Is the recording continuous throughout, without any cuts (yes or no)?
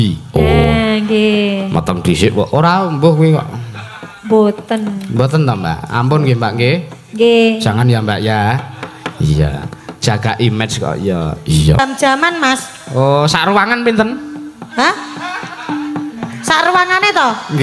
no